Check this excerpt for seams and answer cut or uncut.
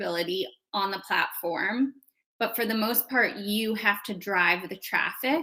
uncut